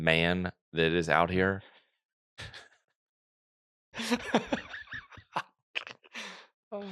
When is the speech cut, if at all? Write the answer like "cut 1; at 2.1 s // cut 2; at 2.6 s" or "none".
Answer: none